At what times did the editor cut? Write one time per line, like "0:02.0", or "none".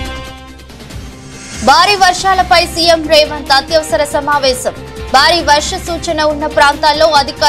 0:01.5